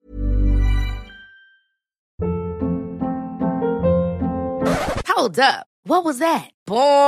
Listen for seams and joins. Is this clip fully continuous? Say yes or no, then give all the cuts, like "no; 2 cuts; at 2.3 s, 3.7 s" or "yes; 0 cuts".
no; 1 cut; at 2.0 s